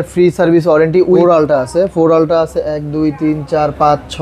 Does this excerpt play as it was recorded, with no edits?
no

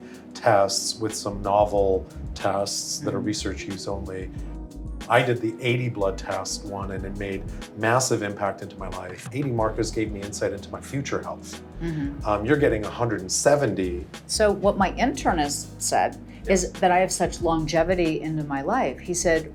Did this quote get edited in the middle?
no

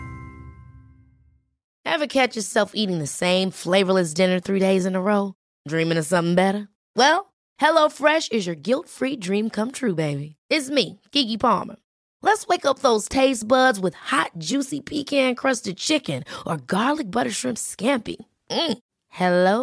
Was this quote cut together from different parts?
no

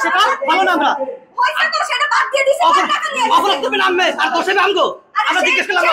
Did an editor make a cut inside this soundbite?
no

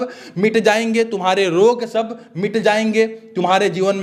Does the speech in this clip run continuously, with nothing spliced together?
yes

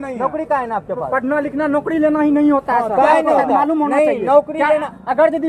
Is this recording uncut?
yes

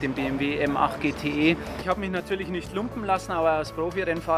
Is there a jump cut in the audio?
yes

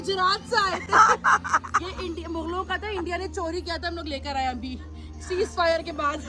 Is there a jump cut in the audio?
no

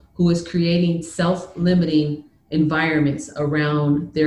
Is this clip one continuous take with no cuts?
yes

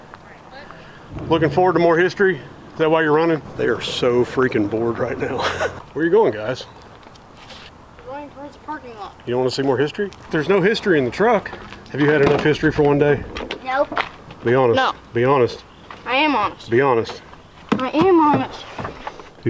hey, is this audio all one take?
no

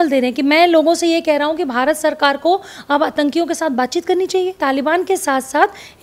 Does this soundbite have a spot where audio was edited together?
yes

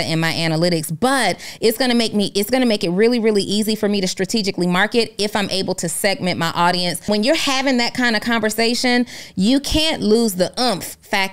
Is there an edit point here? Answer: yes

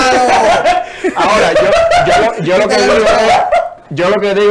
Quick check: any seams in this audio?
no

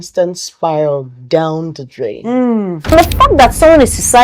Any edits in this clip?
yes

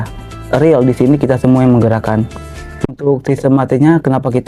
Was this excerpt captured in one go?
no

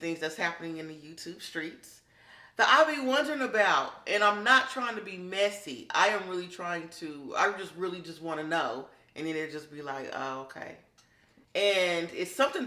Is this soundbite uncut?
yes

